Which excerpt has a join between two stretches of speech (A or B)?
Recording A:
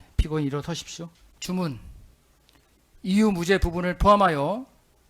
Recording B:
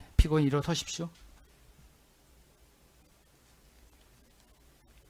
A